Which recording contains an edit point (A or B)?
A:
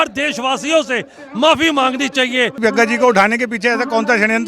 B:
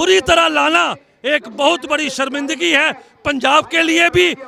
A